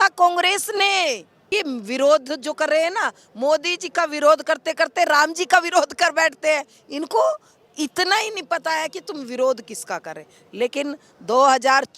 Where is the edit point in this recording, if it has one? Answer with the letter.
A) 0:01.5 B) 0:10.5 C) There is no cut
A